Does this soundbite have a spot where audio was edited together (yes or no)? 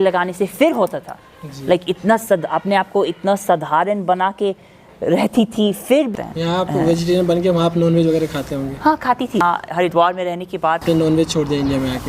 yes